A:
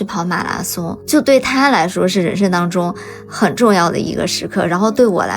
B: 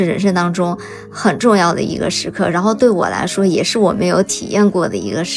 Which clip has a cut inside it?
A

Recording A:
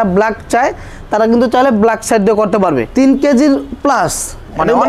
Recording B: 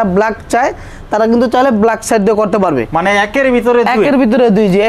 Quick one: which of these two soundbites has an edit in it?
A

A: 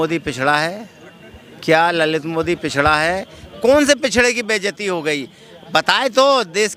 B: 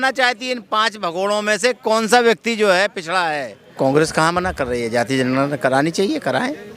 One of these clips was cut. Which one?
B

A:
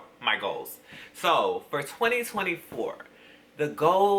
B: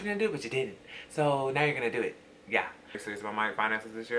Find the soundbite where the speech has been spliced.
B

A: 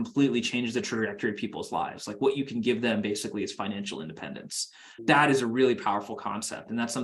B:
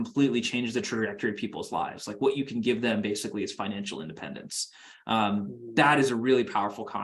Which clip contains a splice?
A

